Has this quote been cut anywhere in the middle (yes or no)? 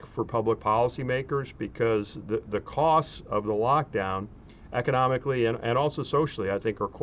no